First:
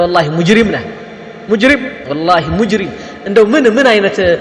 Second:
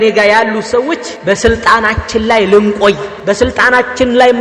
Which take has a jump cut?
second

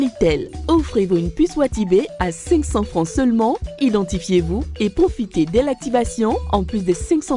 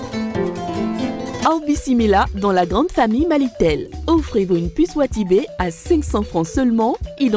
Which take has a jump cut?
second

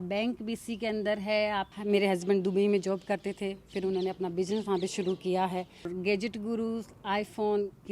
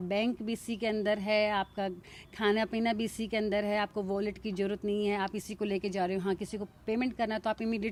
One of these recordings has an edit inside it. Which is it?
first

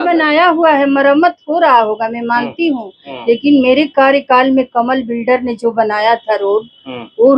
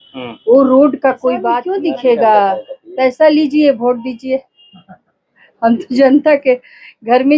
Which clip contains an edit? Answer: second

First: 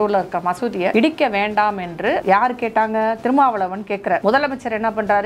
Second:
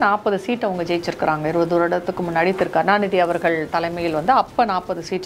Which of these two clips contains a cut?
first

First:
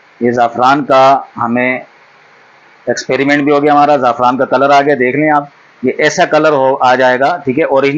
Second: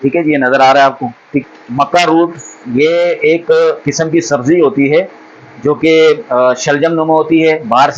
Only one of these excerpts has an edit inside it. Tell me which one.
second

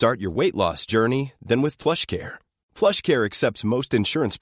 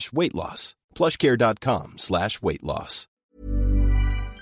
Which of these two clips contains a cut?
second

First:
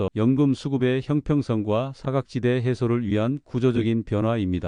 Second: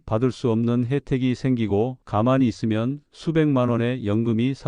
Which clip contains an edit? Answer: second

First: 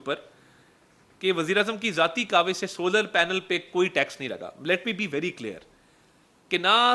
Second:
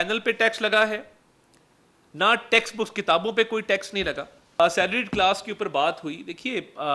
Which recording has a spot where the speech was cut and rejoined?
second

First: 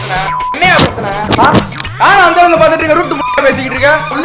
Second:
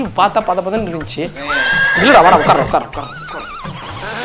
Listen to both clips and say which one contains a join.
first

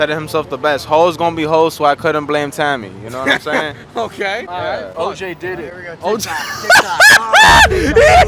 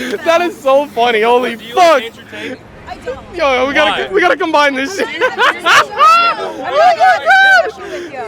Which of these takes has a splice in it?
first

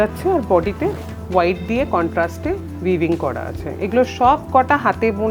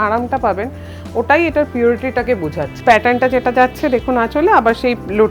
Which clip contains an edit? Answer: second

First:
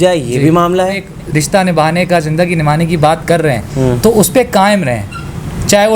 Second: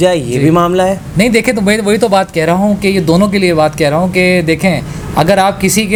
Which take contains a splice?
first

